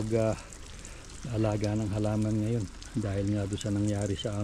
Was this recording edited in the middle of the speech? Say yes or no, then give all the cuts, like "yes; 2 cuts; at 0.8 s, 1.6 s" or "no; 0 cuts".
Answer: no; 0 cuts